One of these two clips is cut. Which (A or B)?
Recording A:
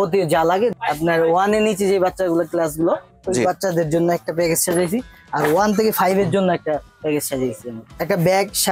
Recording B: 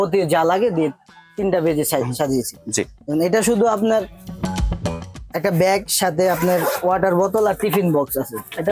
A